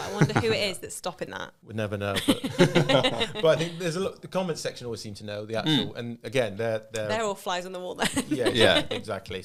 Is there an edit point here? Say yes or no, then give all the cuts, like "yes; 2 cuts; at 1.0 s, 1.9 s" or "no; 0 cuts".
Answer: no; 0 cuts